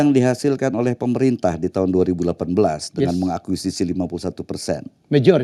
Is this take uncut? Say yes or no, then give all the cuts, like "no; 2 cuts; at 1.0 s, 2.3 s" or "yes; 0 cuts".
yes; 0 cuts